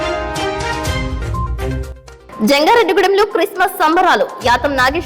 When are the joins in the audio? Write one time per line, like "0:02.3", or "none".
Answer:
0:01.9